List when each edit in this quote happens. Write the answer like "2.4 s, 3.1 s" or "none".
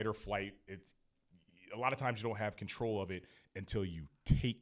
none